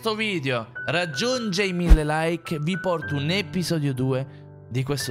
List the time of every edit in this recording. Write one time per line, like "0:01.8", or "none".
none

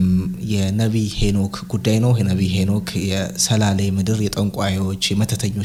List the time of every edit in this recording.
none

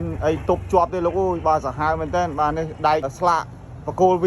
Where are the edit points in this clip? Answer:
0:03.1

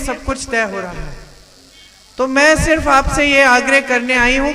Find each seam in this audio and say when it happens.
none

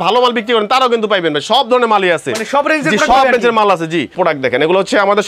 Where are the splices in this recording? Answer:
0:04.1

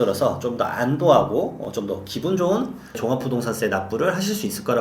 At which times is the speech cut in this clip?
0:03.0

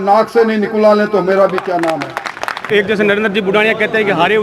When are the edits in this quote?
0:02.6

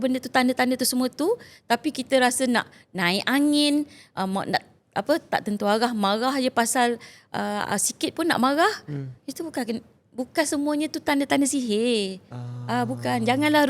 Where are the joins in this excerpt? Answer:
none

